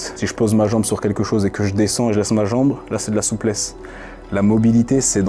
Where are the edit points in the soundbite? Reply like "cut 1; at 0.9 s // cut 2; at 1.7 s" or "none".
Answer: none